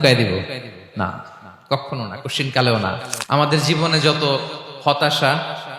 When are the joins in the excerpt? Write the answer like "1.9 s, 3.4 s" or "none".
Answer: 3.1 s